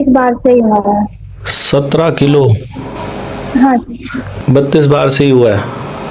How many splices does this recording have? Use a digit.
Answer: 1